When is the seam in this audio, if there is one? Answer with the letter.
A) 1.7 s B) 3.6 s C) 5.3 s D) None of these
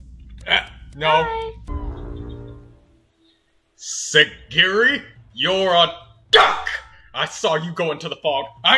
A